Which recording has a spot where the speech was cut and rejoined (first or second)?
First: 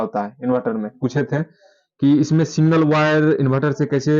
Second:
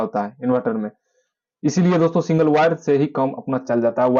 first